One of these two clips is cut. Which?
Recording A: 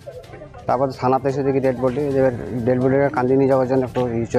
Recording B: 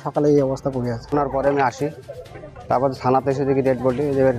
B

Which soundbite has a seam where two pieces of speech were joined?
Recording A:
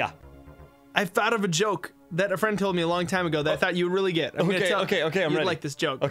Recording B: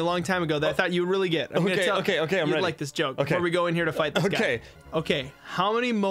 B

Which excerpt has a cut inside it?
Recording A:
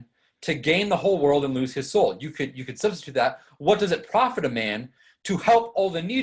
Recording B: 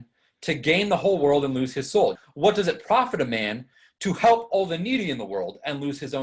B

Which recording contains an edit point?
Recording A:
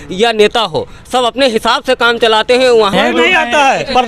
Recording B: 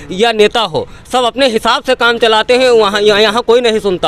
A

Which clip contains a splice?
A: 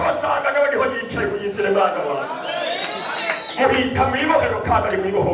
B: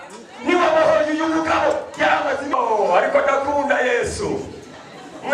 B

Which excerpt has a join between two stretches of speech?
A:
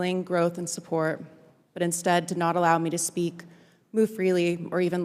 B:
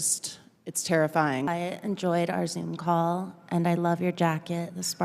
B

